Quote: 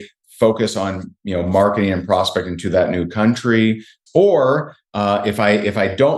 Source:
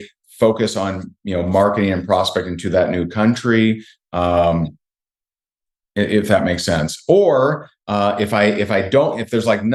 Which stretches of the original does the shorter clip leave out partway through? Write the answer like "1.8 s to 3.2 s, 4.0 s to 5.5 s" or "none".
4.0 s to 6.9 s